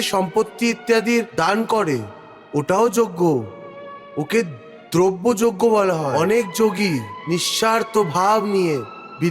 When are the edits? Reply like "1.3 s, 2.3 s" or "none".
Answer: 6.1 s